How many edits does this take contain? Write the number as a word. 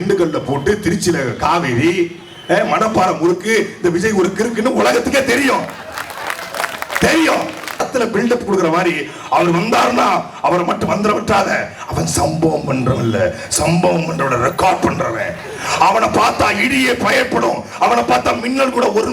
one